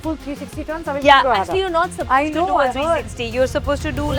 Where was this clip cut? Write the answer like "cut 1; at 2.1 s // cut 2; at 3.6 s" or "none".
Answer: none